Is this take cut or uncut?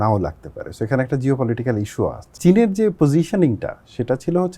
cut